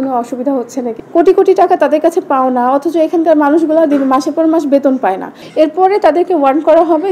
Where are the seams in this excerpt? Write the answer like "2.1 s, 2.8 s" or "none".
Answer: 1.0 s, 5.4 s